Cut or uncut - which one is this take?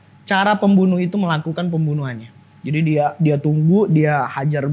uncut